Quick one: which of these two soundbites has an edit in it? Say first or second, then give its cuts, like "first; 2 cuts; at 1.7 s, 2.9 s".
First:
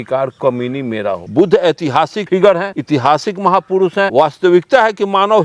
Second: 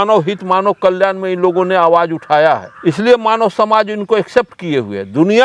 first; 4 cuts; at 1.3 s, 2.2 s, 2.7 s, 4.1 s